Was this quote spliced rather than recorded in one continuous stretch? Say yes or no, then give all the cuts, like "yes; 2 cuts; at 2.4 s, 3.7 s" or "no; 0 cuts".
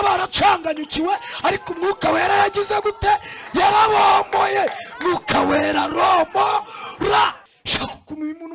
yes; 1 cut; at 7.5 s